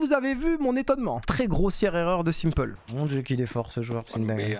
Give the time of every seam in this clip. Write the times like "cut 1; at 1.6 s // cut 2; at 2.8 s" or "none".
cut 1; at 1.2 s // cut 2; at 2.8 s